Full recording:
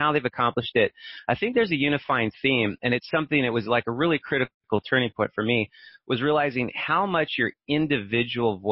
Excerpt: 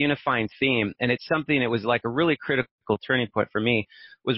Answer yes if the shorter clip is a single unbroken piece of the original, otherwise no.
yes